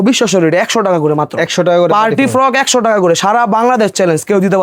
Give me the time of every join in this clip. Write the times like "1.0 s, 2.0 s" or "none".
none